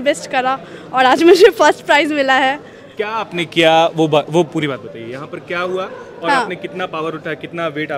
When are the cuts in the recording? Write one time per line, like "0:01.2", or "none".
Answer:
none